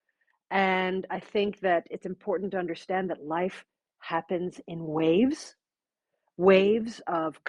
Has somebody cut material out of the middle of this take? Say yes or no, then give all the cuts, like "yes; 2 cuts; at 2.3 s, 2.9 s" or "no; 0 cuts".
no; 0 cuts